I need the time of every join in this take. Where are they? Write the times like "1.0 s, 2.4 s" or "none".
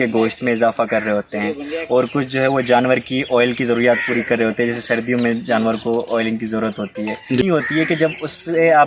7.4 s